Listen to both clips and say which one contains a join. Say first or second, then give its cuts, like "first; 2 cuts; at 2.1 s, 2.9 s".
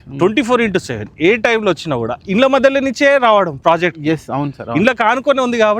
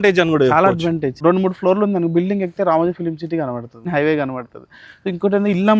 second; 2 cuts; at 1.2 s, 3.9 s